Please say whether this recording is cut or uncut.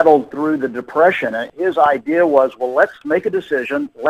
cut